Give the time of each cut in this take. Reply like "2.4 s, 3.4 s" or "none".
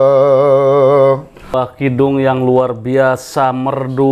1.6 s